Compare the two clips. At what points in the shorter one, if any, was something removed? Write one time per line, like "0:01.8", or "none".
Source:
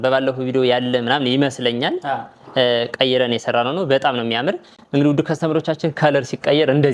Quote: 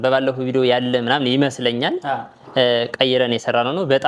none